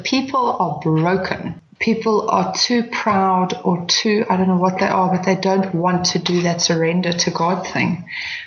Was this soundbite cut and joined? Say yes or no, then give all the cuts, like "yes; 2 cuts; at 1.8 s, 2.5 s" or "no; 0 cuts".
yes; 1 cut; at 1.5 s